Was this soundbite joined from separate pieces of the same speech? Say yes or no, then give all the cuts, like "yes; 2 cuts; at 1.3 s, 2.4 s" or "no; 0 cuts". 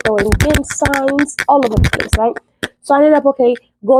no; 0 cuts